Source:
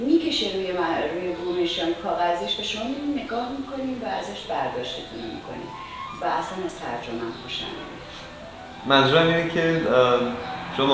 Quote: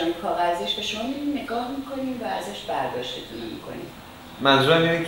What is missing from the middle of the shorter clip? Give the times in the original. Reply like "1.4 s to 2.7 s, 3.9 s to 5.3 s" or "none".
5.8 s to 8.4 s